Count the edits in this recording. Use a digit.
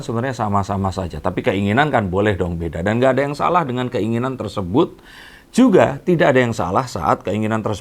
0